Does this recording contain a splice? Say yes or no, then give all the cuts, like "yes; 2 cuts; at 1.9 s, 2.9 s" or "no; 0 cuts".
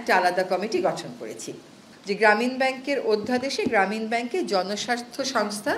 yes; 1 cut; at 1.9 s